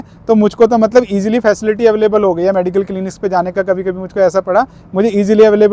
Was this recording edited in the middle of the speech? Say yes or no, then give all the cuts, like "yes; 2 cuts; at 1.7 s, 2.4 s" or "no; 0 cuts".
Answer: no; 0 cuts